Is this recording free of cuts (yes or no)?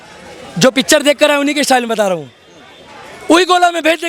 yes